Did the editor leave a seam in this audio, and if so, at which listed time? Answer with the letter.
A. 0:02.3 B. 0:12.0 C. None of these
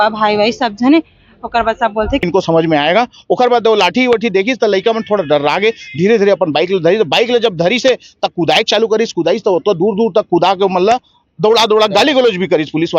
A